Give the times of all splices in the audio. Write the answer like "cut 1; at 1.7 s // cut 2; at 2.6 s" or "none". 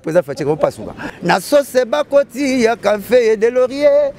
cut 1; at 1.1 s